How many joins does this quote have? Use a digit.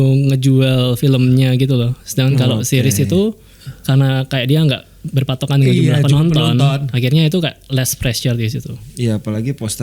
1